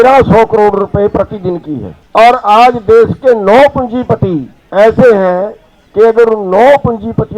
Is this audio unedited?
no; 2 cuts; at 1.9 s, 4.5 s

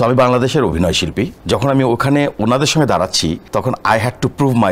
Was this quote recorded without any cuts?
no; 2 cuts; at 1.4 s, 3.4 s

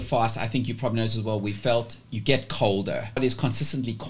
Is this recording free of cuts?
no; 1 cut; at 3.2 s

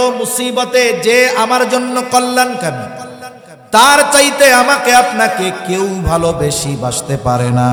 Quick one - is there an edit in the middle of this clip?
no; 0 cuts

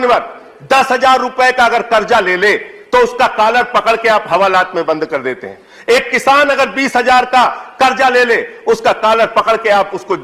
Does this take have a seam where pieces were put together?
no; 0 cuts

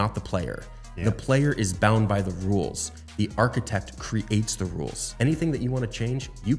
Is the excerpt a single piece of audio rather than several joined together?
no; 1 cut; at 5.0 s

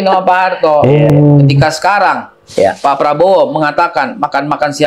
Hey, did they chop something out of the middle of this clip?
yes; 1 cut; at 1.1 s

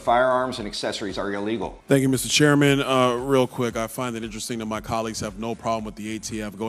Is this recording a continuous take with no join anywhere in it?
no; 1 cut; at 1.7 s

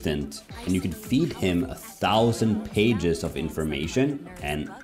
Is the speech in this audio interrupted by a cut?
no; 0 cuts

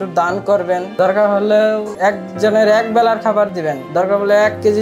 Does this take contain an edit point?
yes; 3 cuts; at 0.9 s, 1.9 s, 3.8 s

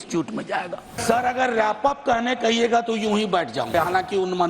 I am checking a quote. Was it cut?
yes; 2 cuts; at 1.0 s, 3.7 s

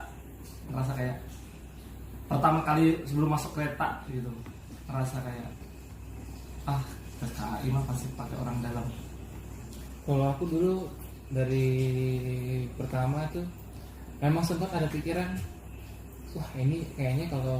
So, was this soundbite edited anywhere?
yes; 1 cut; at 9.7 s

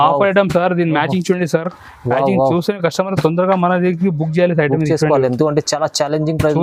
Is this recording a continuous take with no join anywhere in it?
yes; 0 cuts

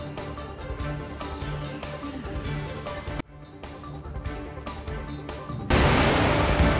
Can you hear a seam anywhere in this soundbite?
yes; 1 cut; at 5.7 s

